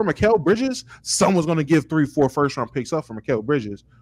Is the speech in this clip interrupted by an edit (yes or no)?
no